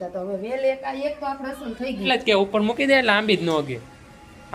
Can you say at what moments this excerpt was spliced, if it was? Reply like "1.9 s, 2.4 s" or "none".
2.1 s